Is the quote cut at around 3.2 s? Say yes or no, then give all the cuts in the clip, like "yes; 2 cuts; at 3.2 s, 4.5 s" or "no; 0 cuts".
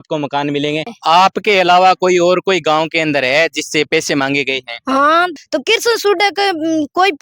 no; 2 cuts; at 0.9 s, 5.4 s